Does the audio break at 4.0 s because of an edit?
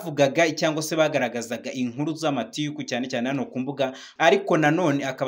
yes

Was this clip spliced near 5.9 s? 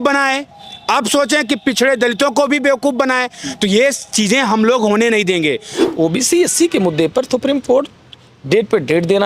yes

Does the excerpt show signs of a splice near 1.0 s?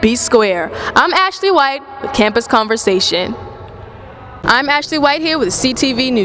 no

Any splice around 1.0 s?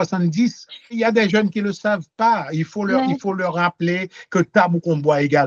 yes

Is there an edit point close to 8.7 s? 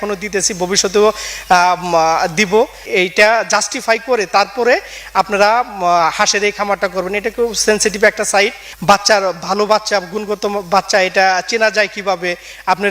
yes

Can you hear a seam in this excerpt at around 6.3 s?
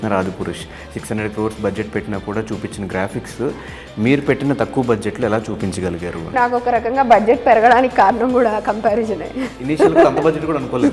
yes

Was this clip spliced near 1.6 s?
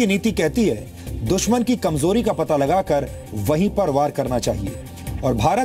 yes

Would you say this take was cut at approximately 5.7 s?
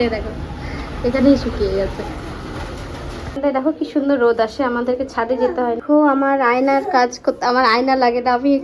no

